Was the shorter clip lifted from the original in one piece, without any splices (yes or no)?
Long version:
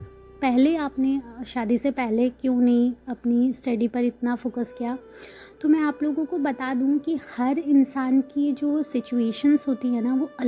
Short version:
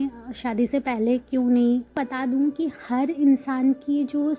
no